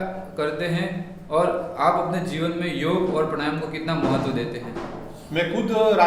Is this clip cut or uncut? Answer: uncut